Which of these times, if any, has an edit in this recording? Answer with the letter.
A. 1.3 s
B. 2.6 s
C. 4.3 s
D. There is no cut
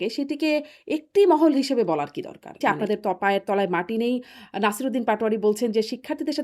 B